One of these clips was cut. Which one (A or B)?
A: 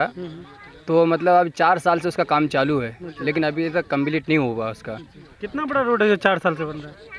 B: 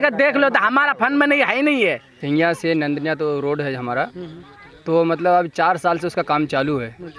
B